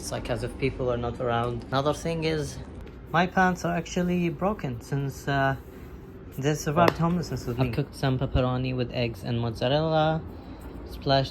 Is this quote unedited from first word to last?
no; 2 cuts; at 1.6 s, 7.7 s

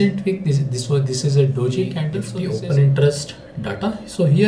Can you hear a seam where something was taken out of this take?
yes; 1 cut; at 2.2 s

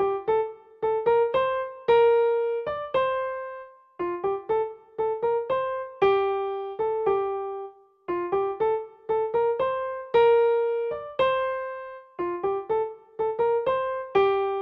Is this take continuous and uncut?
no; 1 cut; at 1.5 s

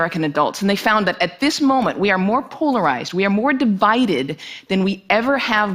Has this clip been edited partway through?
yes; 1 cut; at 4.4 s

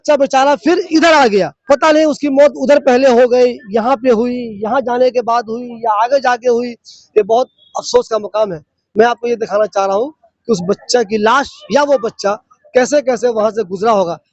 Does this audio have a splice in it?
yes; 1 cut; at 1.5 s

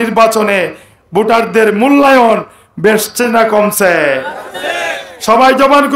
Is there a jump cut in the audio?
no; 0 cuts

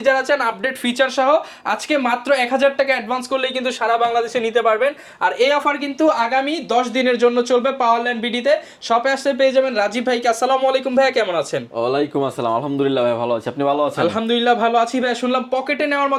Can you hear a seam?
no; 0 cuts

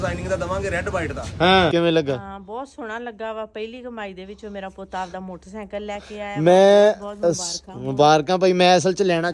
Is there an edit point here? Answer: yes; 1 cut; at 1.7 s

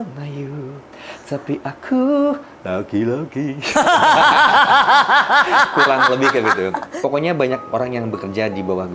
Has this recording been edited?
yes; 1 cut; at 6.8 s

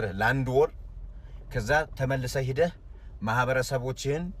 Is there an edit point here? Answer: no; 0 cuts

